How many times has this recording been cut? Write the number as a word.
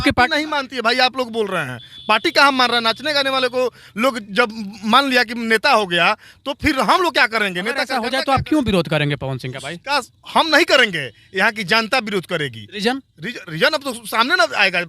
one